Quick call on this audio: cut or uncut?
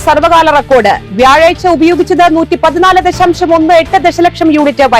uncut